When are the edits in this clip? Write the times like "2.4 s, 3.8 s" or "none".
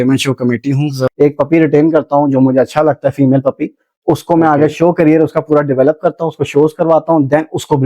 1.0 s